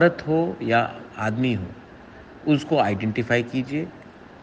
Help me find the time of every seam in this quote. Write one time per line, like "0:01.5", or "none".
none